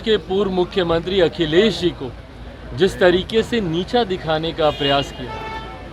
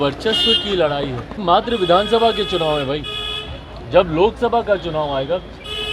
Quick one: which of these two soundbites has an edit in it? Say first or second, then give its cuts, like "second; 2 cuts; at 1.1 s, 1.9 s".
second; 1 cut; at 1.3 s